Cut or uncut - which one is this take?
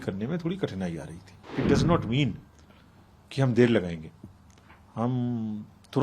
cut